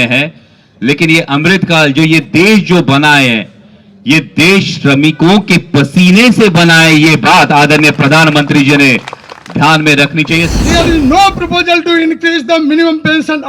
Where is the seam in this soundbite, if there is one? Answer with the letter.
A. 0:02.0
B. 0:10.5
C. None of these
B